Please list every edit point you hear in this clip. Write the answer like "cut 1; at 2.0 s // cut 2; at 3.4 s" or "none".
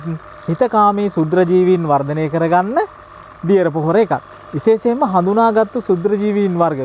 none